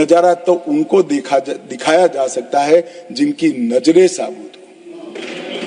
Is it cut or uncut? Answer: uncut